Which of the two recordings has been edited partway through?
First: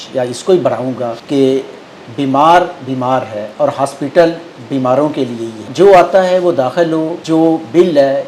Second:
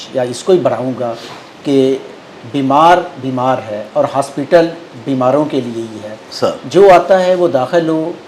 first; 3 cuts; at 1.2 s, 5.7 s, 7.2 s

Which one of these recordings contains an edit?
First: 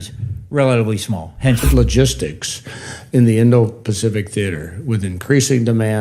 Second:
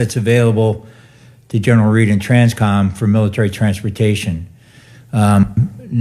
first; 1 cut; at 1.7 s

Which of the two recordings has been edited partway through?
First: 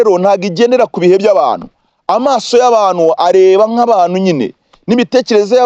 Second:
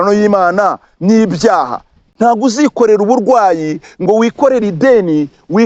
second; 1 cut; at 2.0 s

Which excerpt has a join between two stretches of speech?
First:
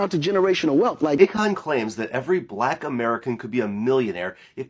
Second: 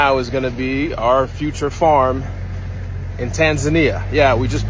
first; 1 cut; at 1.2 s

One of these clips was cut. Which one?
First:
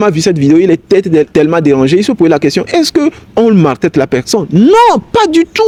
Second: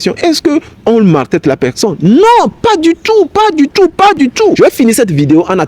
second; 1 cut; at 4.6 s

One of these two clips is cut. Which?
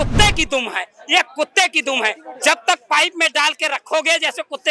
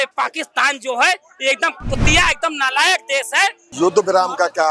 second; 1 cut; at 3.6 s

